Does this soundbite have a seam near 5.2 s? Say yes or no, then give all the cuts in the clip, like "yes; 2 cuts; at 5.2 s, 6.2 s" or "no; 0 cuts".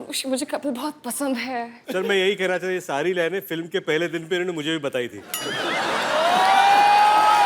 no; 1 cut; at 1.8 s